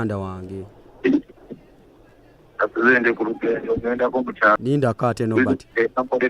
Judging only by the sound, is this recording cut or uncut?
cut